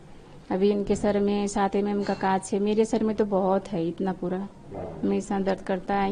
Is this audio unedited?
yes; 0 cuts

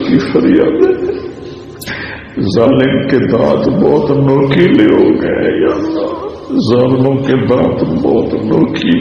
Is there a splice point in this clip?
no; 0 cuts

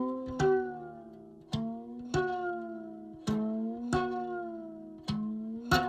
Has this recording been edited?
no; 0 cuts

